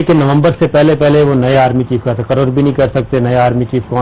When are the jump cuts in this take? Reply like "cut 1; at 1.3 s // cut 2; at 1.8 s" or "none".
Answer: cut 1; at 3.0 s